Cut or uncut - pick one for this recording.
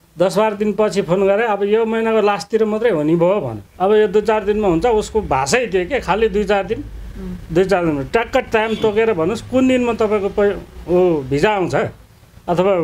cut